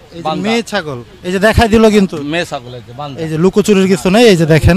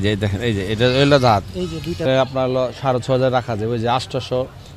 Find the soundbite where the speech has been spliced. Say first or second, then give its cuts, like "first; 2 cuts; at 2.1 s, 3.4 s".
second; 1 cut; at 1.9 s